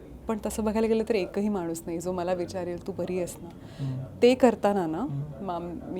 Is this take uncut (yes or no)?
yes